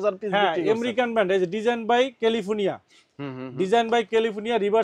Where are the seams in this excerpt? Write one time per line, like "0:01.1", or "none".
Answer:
none